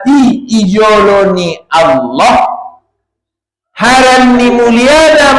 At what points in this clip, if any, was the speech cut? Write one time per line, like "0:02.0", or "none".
none

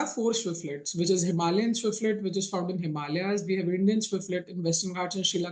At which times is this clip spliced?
none

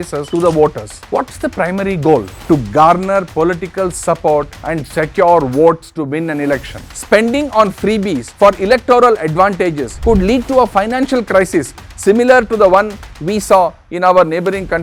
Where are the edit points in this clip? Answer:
0:06.8

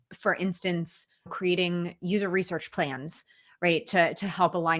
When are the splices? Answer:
0:01.3

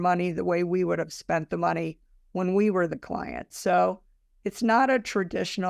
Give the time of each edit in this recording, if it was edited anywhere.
none

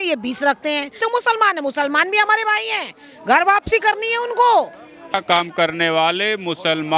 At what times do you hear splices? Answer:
0:01.0
0:05.1

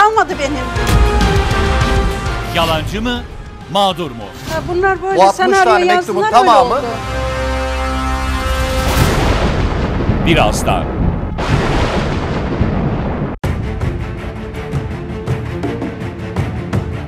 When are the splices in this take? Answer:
0:13.4

